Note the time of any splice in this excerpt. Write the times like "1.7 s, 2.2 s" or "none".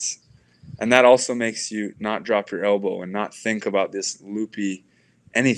none